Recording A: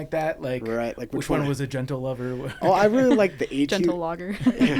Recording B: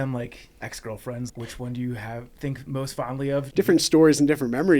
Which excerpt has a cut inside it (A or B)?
B